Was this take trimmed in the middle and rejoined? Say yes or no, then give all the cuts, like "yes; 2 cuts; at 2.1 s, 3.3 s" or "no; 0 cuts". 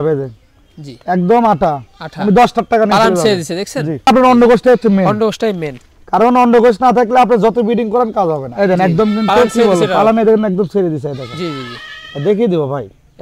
yes; 2 cuts; at 4.1 s, 8.5 s